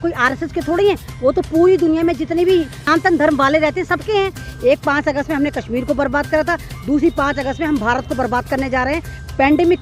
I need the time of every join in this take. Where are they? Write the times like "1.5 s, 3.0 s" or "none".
2.8 s, 4.5 s

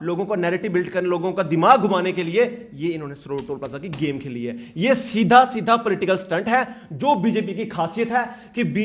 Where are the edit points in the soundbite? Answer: none

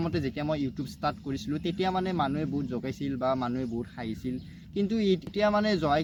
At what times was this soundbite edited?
none

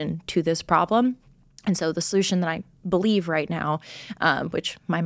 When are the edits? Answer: none

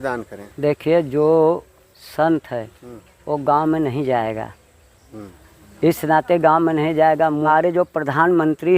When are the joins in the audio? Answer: 7.4 s

